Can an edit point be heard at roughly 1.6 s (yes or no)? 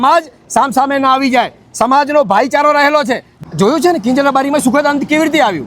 no